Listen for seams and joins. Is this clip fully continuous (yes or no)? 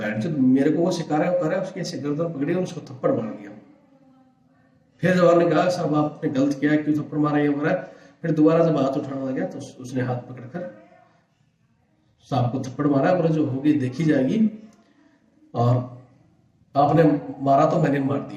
yes